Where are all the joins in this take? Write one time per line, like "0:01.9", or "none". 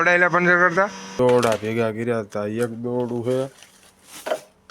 0:01.2